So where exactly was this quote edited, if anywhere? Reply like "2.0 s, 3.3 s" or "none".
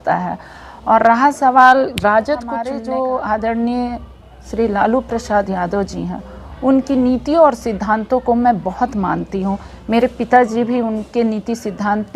2.7 s